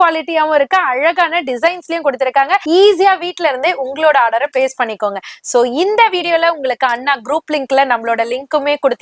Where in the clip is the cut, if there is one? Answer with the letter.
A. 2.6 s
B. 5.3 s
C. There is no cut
A